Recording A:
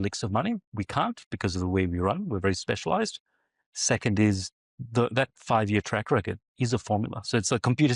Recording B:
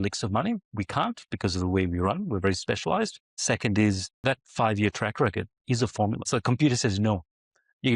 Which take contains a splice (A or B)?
B